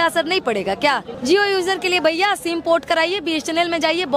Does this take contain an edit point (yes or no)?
yes